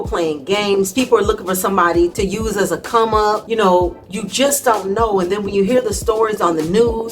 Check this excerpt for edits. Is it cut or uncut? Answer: uncut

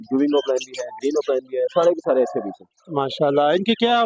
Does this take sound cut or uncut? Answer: uncut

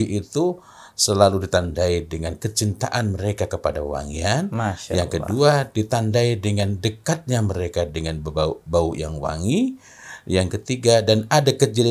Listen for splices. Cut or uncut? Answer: uncut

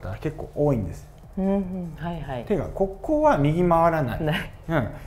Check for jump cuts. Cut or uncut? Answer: uncut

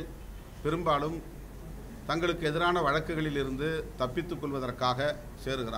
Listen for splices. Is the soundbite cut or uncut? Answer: uncut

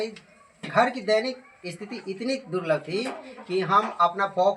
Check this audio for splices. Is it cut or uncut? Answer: uncut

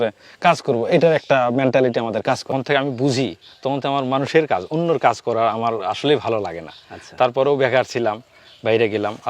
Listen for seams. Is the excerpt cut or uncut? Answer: cut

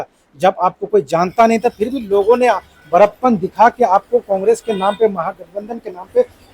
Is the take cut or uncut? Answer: uncut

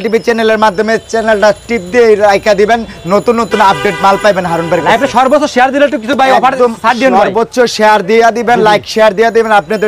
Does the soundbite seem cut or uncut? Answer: uncut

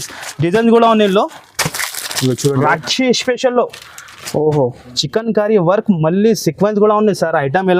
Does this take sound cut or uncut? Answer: cut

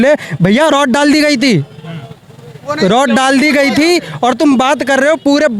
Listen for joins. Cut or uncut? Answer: uncut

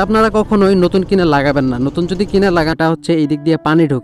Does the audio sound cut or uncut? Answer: cut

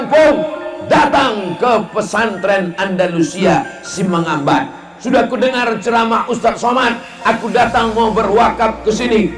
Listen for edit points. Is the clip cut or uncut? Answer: uncut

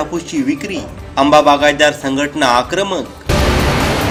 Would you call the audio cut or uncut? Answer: uncut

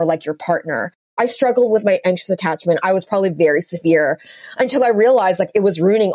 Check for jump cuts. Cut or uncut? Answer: cut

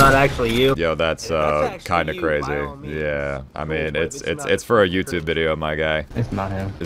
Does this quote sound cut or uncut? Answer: uncut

